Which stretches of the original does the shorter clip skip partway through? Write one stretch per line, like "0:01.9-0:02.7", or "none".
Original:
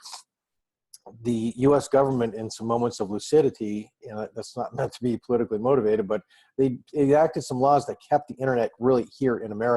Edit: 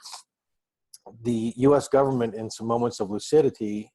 none